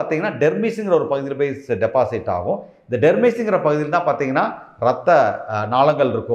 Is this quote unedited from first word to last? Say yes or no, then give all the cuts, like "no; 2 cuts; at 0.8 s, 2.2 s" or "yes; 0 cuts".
yes; 0 cuts